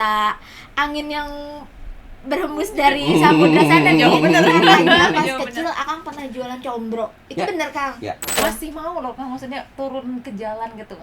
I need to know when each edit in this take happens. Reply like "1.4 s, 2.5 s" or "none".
8.4 s